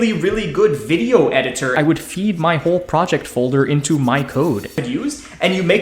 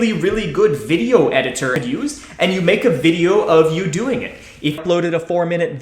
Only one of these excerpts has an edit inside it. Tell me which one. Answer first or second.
second